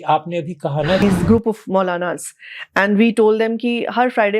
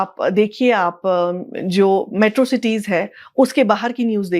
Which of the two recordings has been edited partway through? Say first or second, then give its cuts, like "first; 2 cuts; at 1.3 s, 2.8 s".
first; 1 cut; at 1.0 s